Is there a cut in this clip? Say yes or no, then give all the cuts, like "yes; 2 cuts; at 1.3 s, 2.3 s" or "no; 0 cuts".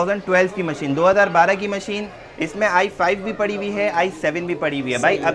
no; 0 cuts